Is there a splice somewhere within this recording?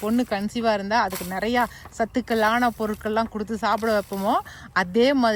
no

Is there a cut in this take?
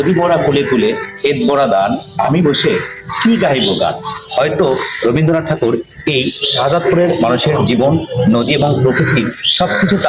no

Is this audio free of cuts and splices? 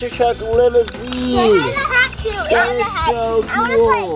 yes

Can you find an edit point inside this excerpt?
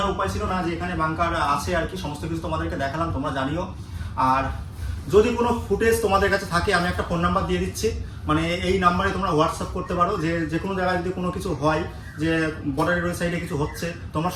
no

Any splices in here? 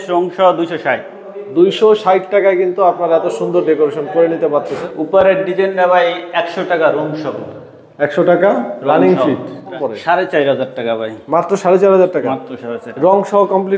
yes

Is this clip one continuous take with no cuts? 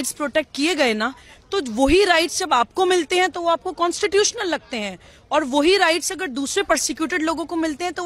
yes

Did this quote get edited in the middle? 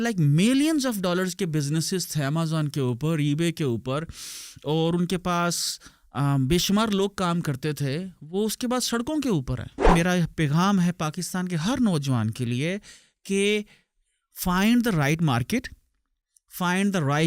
yes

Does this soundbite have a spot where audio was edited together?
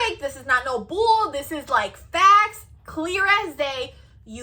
no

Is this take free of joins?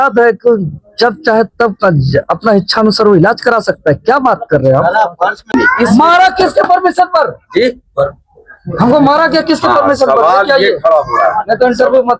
no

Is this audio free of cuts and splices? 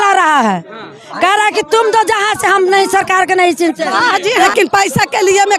no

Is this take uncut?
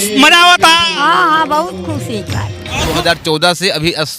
no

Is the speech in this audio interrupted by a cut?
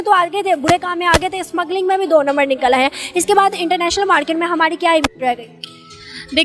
no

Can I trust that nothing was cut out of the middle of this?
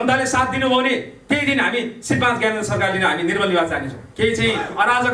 no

